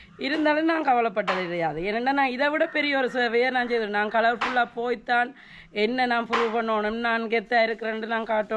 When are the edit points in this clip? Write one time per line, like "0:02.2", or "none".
none